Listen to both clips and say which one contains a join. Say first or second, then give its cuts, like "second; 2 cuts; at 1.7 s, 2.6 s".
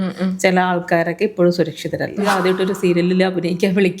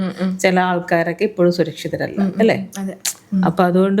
first; 1 cut; at 2.2 s